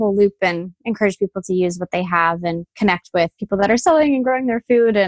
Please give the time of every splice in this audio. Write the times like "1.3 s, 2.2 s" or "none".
none

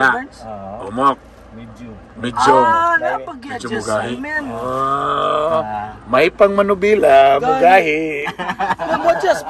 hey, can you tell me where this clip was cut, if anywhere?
none

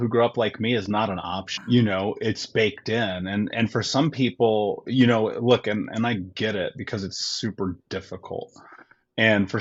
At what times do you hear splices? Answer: none

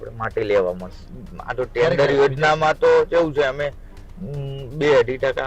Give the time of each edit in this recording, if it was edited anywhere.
1.1 s

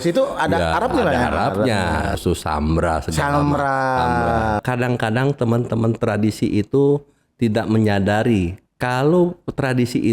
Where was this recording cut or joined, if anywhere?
2.2 s, 4.6 s

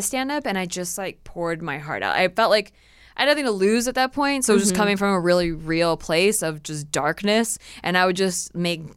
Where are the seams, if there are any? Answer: none

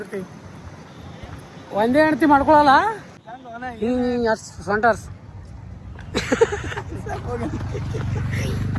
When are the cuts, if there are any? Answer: 3.1 s

